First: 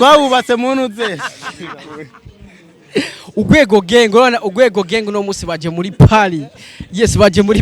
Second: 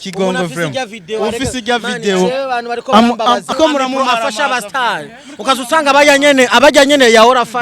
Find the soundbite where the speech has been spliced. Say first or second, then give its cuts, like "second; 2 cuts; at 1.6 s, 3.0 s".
second; 1 cut; at 3.5 s